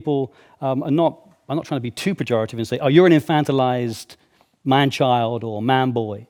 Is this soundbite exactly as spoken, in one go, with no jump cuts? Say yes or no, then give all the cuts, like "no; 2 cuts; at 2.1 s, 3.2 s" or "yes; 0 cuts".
yes; 0 cuts